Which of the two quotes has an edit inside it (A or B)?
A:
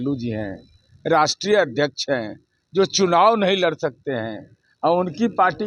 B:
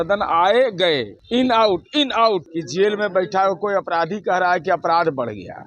B